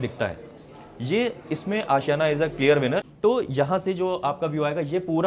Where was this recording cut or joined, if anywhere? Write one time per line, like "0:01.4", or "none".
0:03.1